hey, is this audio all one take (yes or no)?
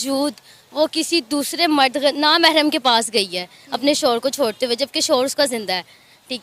yes